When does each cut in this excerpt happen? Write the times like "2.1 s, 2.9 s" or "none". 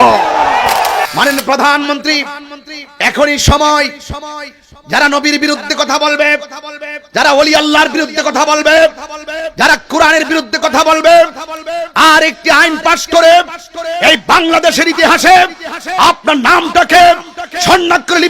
1.0 s